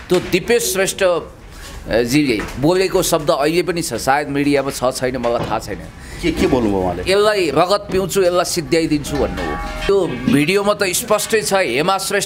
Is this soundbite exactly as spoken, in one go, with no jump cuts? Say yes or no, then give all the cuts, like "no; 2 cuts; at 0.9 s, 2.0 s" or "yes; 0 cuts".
no; 1 cut; at 9.9 s